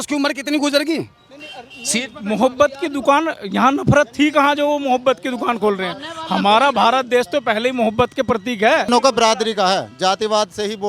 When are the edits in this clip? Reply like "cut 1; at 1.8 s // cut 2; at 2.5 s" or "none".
cut 1; at 8.9 s